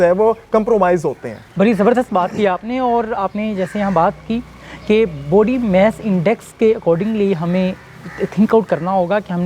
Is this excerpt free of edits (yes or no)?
yes